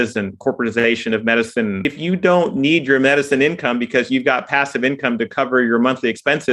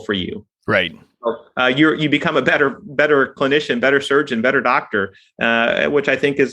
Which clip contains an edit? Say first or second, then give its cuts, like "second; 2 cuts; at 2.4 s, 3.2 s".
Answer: first; 1 cut; at 1.8 s